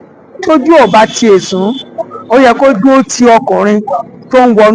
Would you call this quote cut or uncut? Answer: uncut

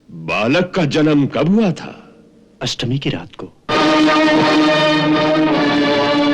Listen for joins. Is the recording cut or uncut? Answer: uncut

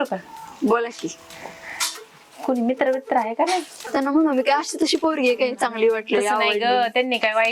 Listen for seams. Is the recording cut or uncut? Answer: cut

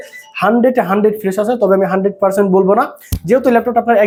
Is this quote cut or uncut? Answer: uncut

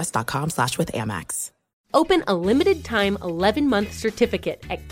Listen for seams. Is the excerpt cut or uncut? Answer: cut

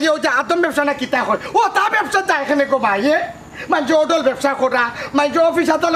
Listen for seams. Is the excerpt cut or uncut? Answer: uncut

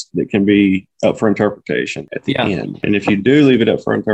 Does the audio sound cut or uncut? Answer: cut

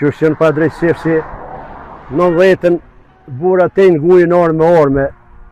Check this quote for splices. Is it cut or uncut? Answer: uncut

